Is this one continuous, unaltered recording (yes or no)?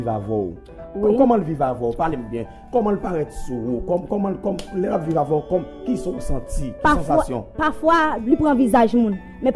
yes